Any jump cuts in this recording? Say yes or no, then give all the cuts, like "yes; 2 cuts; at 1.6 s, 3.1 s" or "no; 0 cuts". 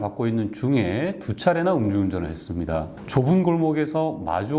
yes; 1 cut; at 2.9 s